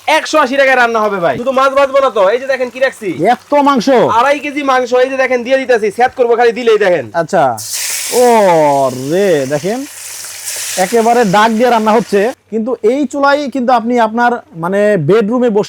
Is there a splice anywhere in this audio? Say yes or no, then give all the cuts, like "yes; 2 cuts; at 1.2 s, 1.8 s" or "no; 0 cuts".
yes; 2 cuts; at 1.4 s, 12.3 s